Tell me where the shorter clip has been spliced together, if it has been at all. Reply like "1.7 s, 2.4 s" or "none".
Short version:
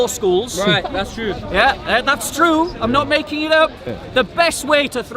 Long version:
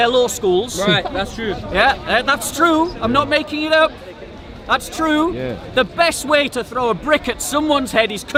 3.9 s